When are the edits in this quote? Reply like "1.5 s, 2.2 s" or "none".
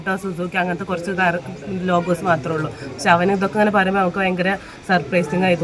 none